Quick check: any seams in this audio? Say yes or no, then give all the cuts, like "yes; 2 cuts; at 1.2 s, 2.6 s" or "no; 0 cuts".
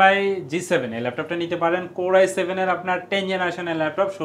no; 0 cuts